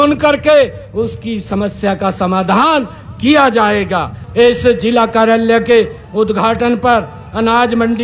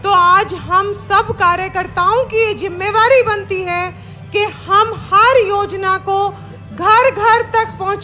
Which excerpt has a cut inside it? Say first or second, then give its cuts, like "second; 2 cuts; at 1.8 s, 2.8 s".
first; 1 cut; at 4.2 s